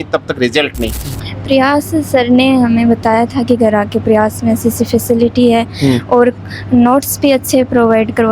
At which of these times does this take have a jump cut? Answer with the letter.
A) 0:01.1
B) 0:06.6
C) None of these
A